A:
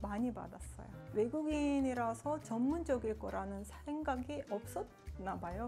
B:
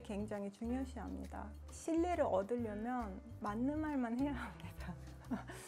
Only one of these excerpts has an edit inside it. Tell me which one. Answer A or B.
B